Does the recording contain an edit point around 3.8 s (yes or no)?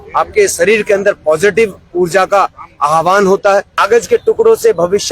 yes